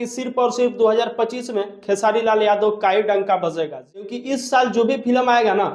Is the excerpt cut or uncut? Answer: cut